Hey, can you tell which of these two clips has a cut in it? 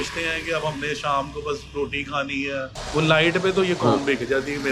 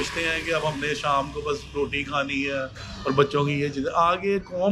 first; 1 cut; at 2.8 s

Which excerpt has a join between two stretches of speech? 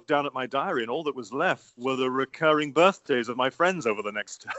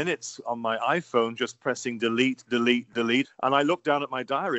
first; 1 cut; at 1.8 s

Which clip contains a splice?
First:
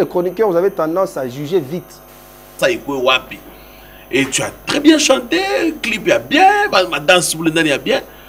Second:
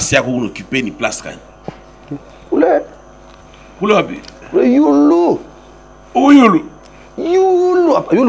first; 1 cut; at 2.5 s

